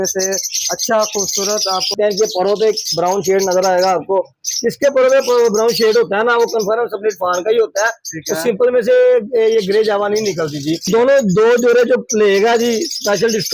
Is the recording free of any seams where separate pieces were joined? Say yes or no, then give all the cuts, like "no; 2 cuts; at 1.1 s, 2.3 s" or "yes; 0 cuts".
no; 2 cuts; at 1.9 s, 10.9 s